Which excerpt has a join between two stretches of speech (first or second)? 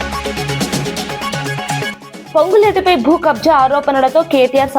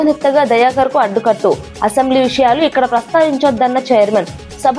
first